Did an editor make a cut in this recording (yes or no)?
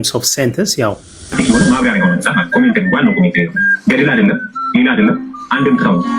yes